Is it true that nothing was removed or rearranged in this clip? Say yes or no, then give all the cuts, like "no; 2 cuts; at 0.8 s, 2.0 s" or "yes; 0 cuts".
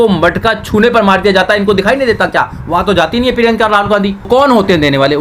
no; 1 cut; at 4.3 s